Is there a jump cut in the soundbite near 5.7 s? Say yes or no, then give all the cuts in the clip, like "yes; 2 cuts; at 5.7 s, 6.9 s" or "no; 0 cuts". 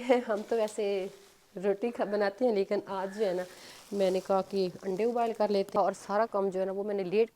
yes; 1 cut; at 5.7 s